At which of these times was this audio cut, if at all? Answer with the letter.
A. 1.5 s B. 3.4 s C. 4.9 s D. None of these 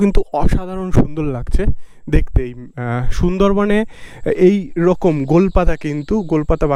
D